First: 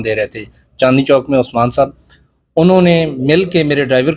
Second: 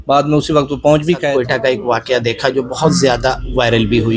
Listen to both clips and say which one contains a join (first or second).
second